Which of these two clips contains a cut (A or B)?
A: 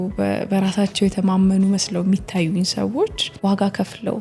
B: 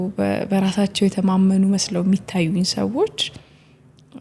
A